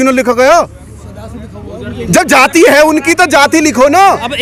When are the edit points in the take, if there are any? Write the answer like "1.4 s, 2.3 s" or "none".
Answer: none